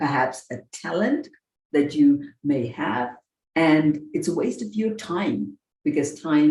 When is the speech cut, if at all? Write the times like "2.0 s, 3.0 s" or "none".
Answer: none